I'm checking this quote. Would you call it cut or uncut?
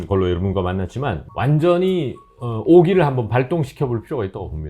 cut